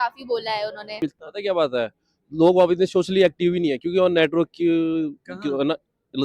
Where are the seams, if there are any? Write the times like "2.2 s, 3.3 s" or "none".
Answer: 1.0 s